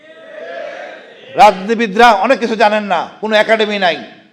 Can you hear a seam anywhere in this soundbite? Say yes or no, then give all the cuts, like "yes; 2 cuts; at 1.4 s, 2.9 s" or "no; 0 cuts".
no; 0 cuts